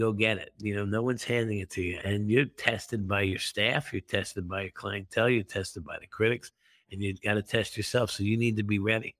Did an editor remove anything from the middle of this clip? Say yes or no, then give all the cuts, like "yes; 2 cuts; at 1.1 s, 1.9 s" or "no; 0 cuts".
yes; 1 cut; at 2.0 s